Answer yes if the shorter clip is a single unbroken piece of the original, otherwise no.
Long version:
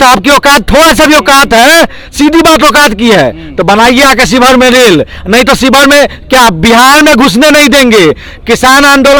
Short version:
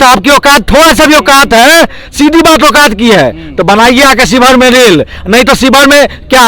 yes